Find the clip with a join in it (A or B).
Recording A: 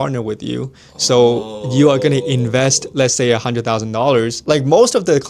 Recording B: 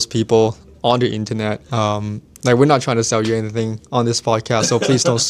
A